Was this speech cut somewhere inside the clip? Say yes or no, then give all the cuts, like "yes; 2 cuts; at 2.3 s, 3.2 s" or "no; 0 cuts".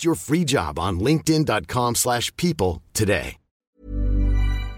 yes; 1 cut; at 3.6 s